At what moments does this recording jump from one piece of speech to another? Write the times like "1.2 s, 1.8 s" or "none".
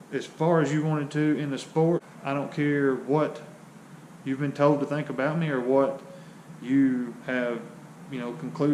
2.1 s